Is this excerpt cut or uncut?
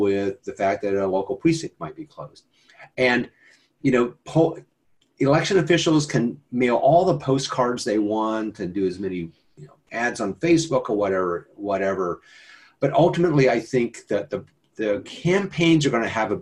uncut